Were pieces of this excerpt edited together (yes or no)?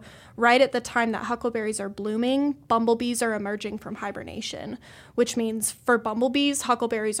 no